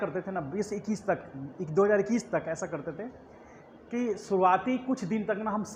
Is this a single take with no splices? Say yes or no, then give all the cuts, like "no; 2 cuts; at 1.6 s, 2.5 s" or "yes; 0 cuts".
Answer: yes; 0 cuts